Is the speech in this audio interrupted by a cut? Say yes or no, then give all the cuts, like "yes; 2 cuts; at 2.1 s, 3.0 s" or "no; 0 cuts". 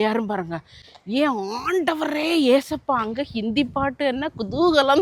no; 0 cuts